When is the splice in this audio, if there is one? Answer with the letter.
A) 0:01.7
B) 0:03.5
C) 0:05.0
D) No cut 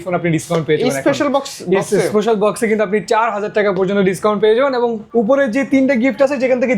C